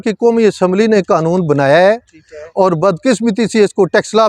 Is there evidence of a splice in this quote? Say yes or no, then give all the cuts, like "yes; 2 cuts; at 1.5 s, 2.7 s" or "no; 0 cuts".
no; 0 cuts